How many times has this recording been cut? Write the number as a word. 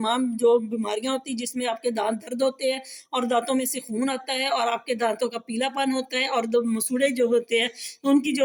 zero